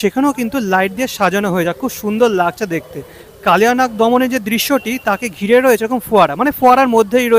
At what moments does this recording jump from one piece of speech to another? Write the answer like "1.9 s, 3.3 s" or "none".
none